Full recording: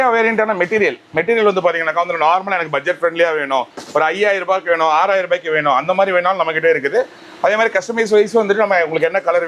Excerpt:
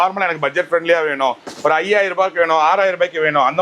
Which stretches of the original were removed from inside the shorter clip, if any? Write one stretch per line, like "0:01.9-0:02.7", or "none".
none